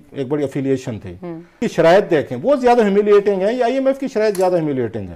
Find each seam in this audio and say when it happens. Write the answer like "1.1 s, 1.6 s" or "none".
1.6 s